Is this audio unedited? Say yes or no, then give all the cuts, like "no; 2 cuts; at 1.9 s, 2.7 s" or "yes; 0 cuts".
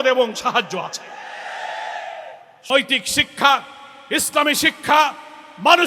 no; 1 cut; at 2.7 s